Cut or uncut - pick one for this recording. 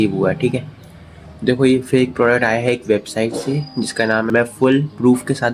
cut